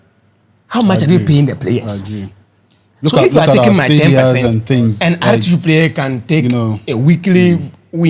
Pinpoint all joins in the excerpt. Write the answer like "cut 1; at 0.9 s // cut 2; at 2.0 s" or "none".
none